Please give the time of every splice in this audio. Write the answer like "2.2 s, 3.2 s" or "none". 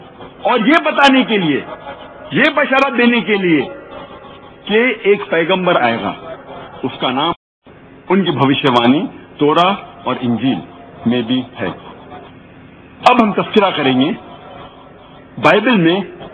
7.5 s